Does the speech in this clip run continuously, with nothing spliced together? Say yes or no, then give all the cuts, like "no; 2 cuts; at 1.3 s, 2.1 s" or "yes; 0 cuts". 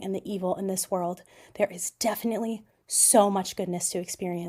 yes; 0 cuts